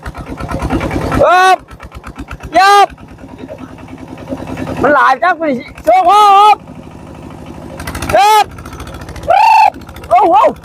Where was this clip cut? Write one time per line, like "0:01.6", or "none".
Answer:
none

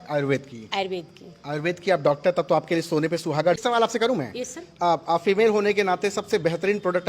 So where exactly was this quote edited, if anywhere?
0:03.6

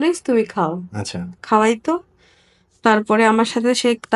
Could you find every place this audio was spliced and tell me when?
none

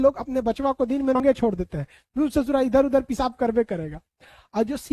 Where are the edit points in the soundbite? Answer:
0:01.2

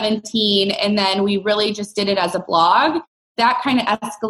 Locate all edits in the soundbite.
0:03.3

